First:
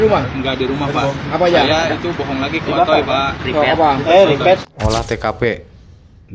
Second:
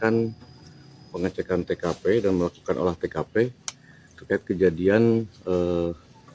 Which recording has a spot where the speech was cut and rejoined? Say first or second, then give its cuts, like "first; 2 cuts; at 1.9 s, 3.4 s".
first; 1 cut; at 4.7 s